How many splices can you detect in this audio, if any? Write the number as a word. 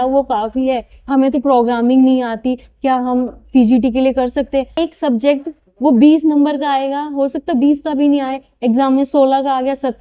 two